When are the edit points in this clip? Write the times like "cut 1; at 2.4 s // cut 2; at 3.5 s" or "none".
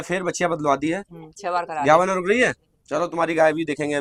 none